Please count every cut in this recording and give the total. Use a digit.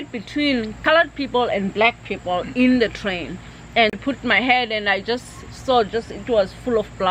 2